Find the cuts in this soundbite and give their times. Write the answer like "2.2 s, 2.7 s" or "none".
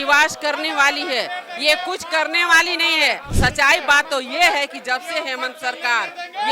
3.3 s